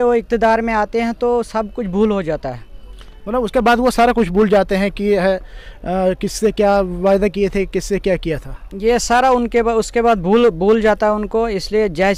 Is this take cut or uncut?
uncut